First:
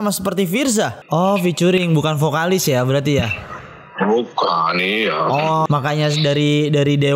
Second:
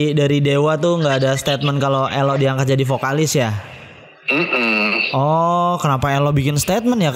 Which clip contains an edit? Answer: first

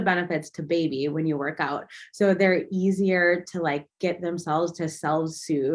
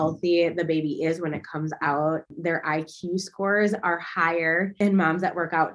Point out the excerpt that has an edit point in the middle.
second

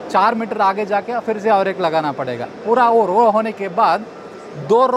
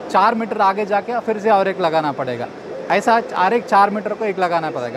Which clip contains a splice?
first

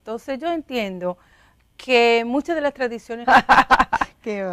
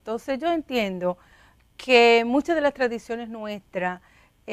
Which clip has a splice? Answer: second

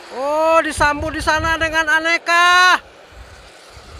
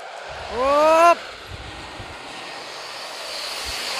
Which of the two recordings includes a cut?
second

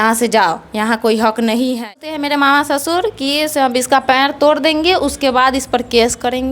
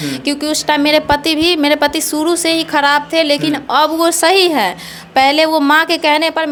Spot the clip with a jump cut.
first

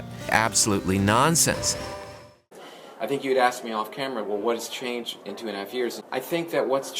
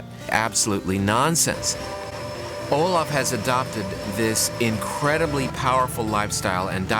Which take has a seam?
first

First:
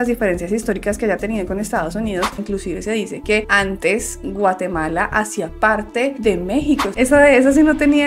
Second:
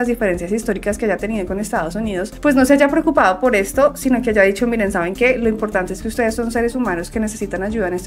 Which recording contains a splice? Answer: first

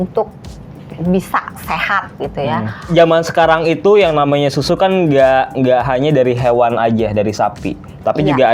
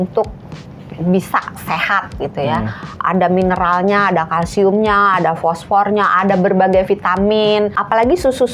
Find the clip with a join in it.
first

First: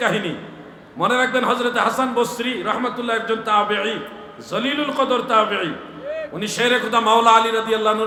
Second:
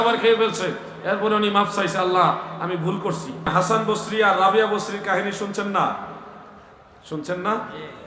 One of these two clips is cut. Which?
second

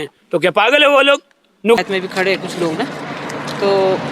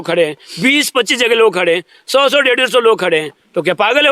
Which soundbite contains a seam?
first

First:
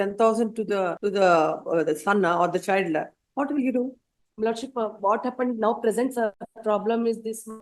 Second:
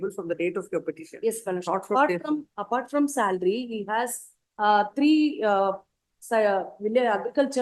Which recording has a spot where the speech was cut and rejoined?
first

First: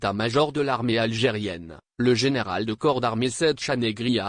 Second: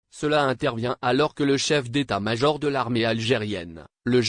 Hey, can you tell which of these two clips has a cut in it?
first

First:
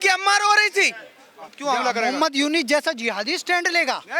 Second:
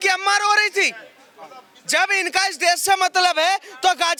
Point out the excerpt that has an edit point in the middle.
first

